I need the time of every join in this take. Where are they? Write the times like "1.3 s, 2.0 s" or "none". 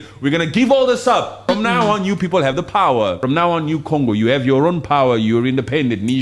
1.4 s, 3.2 s